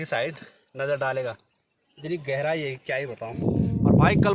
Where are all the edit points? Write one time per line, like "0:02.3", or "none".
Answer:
0:03.4